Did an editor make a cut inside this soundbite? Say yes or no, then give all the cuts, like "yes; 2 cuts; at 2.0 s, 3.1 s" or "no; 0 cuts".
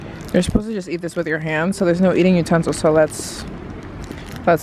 no; 0 cuts